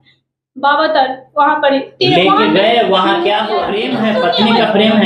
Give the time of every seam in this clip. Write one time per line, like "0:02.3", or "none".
0:03.7

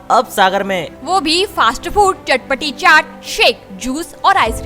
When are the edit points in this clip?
none

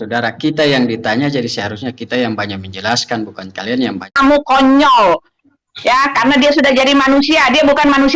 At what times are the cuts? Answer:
0:04.1

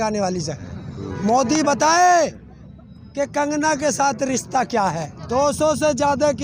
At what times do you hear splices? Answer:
0:05.1

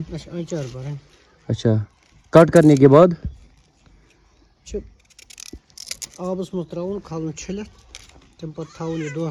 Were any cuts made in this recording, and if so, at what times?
none

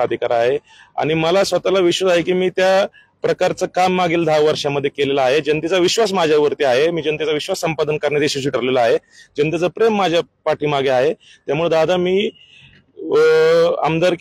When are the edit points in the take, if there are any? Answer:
none

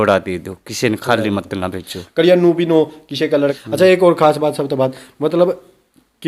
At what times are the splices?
0:03.5

